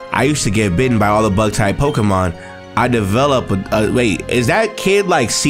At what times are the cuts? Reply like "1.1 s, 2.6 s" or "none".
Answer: none